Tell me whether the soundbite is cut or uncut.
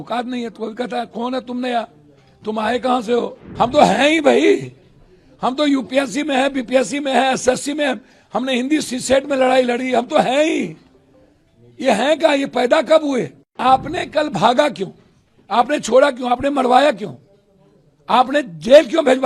cut